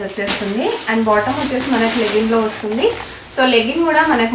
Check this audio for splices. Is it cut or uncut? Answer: uncut